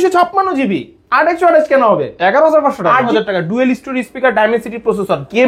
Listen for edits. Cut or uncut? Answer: cut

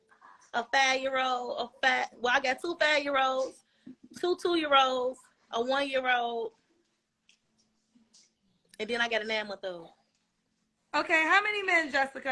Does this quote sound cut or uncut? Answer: uncut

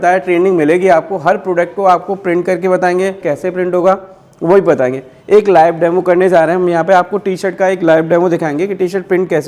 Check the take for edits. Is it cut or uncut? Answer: uncut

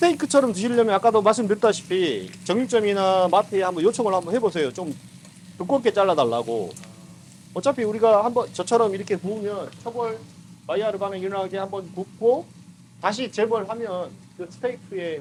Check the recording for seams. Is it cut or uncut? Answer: uncut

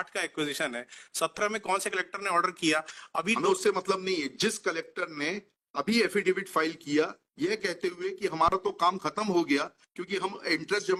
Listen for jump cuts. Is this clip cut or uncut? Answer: uncut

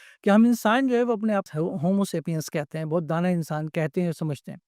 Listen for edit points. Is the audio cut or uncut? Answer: cut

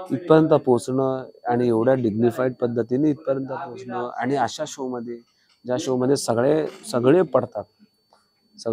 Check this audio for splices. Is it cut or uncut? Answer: uncut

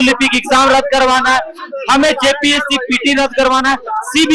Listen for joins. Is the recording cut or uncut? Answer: uncut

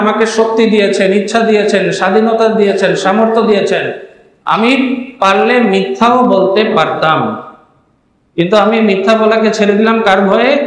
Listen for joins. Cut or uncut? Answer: uncut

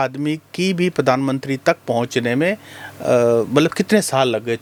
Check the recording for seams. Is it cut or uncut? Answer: uncut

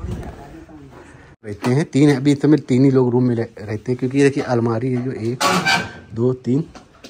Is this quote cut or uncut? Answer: cut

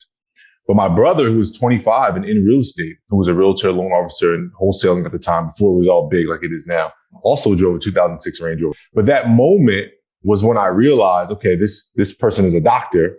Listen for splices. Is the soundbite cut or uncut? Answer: cut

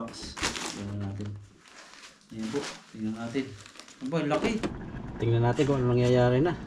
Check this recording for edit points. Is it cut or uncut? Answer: cut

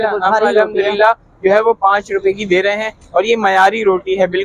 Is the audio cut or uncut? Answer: uncut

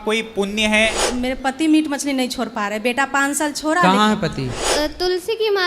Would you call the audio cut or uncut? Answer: cut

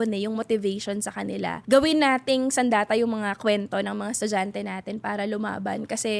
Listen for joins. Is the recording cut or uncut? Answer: cut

